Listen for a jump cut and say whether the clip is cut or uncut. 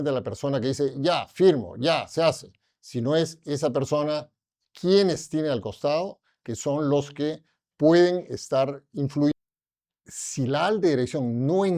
cut